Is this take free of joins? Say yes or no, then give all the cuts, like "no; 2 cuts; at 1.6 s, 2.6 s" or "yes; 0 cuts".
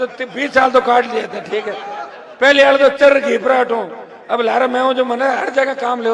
yes; 0 cuts